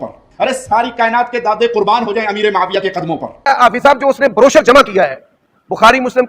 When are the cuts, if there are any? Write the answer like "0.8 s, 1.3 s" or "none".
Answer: 3.3 s